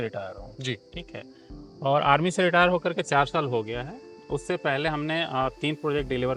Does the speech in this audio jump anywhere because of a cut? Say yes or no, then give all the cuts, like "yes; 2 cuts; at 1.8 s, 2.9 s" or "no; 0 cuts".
no; 0 cuts